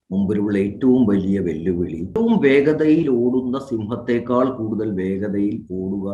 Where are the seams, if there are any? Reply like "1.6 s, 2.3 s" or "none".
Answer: 2.1 s

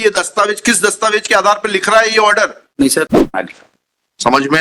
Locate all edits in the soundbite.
3.2 s

